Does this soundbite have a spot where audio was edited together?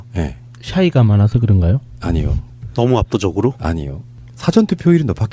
yes; 1 cut; at 4.2 s

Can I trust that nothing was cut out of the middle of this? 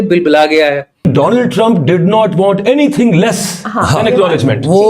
no; 1 cut; at 1.1 s

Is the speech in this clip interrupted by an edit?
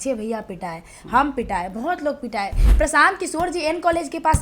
yes; 1 cut; at 2.6 s

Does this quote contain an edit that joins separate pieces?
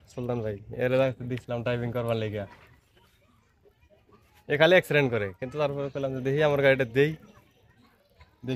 no; 0 cuts

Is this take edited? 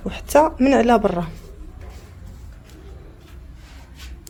no; 0 cuts

